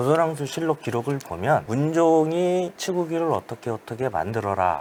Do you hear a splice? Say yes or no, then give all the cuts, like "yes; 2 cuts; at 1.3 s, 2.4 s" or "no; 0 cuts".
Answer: no; 0 cuts